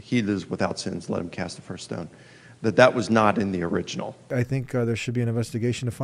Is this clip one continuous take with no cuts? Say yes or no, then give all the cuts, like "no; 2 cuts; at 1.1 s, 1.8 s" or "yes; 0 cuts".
no; 1 cut; at 4.3 s